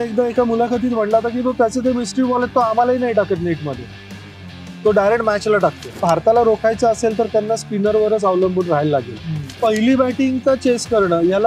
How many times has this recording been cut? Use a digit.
2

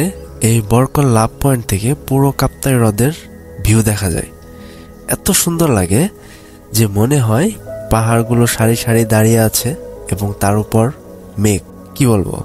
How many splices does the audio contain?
0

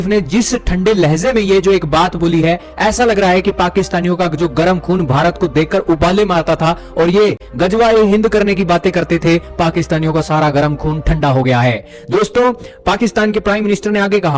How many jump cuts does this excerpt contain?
0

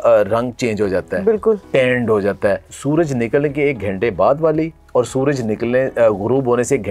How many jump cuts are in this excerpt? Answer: 1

